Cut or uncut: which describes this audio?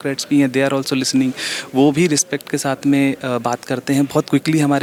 uncut